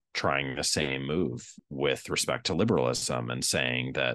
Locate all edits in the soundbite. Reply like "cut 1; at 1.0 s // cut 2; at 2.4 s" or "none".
cut 1; at 1.5 s